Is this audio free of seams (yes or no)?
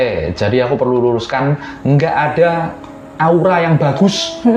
yes